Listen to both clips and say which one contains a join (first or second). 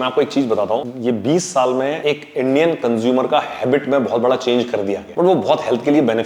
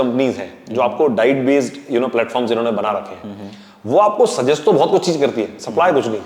first